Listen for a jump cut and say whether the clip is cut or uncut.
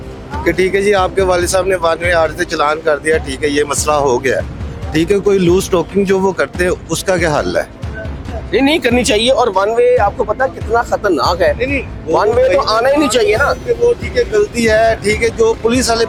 uncut